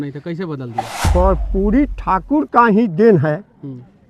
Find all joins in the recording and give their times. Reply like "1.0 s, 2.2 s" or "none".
1.0 s